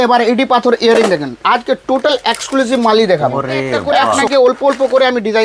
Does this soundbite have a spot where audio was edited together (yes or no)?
yes